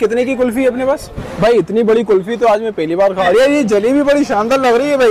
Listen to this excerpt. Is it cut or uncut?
cut